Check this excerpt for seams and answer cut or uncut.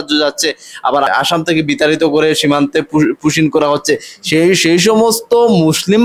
cut